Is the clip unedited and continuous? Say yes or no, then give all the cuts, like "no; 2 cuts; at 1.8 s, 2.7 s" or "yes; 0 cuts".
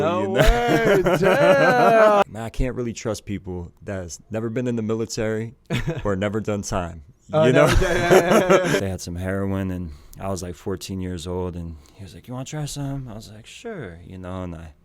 no; 2 cuts; at 2.2 s, 8.8 s